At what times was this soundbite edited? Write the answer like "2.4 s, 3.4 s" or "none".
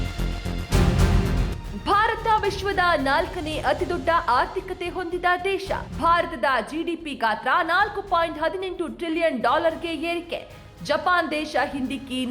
1.1 s